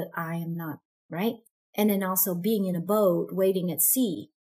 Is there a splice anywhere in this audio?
yes; 1 cut; at 1.6 s

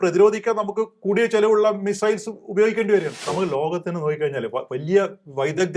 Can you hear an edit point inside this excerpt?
yes; 1 cut; at 3.2 s

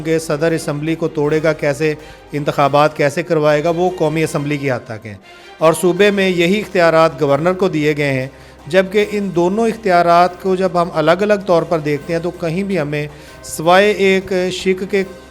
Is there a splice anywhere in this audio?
no; 0 cuts

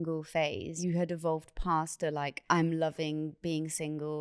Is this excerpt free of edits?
no; 2 cuts; at 0.8 s, 2.3 s

